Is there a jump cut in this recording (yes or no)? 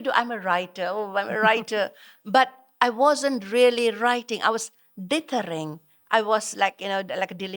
no